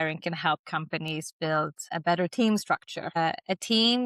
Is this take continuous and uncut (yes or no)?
no